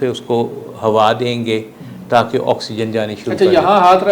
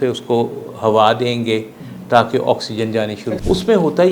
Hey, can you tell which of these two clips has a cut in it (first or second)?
second